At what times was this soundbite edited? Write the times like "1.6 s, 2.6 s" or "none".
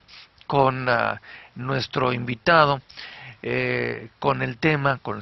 0.9 s